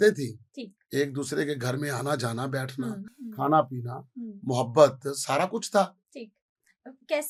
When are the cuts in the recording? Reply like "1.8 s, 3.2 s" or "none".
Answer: none